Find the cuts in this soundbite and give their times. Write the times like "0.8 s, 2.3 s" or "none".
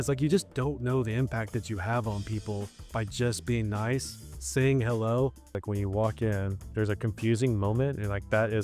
5.5 s, 6.7 s